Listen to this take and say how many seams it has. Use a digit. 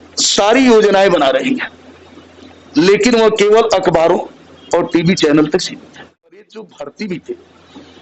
1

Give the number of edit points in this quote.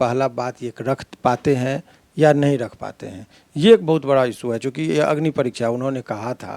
0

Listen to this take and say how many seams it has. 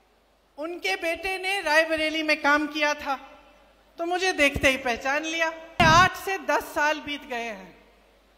1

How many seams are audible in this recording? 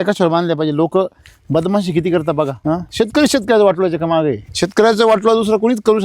2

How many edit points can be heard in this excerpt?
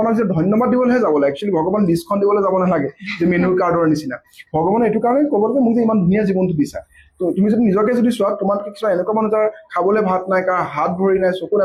0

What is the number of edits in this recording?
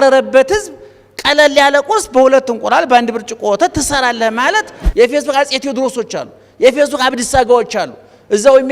1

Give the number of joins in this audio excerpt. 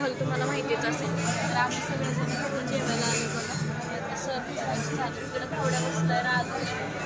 0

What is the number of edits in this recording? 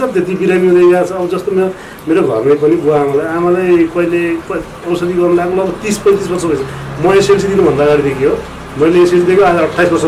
0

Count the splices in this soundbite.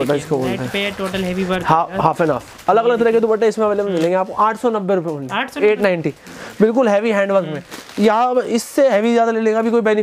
0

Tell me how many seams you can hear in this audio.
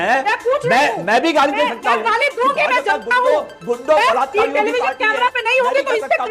0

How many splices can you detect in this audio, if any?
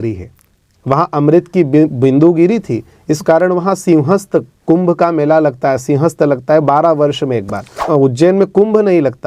1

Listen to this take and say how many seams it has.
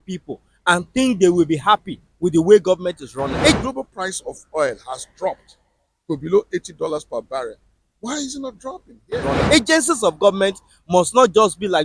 2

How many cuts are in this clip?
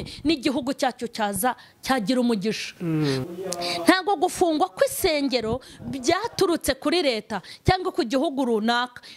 1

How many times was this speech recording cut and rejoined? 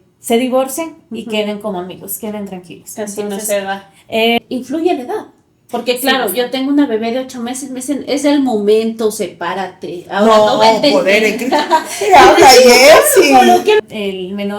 2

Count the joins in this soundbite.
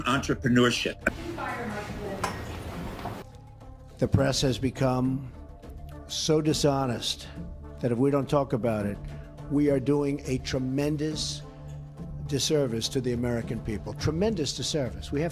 1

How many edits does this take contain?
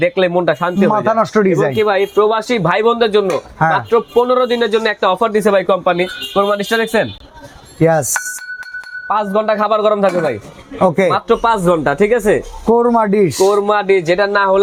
0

